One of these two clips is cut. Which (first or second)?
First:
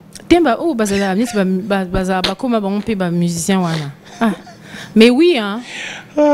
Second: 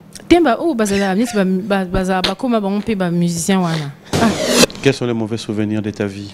second